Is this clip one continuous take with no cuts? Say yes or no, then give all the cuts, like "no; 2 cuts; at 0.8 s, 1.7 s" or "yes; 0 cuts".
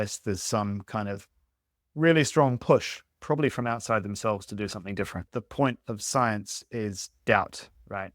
no; 1 cut; at 5.2 s